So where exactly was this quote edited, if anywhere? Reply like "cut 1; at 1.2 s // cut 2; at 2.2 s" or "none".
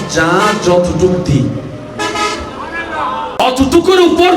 cut 1; at 3.4 s